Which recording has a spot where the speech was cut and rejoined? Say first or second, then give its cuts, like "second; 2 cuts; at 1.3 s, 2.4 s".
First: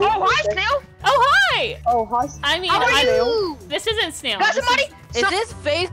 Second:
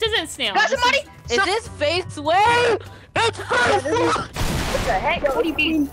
first; 1 cut; at 1.7 s